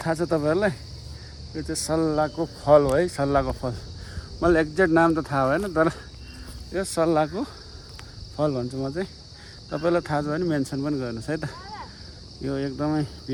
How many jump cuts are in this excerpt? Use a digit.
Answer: 0